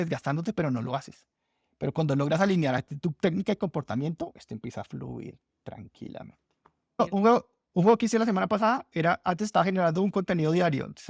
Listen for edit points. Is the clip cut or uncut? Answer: cut